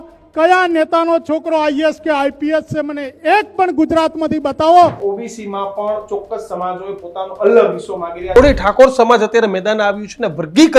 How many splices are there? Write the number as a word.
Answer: two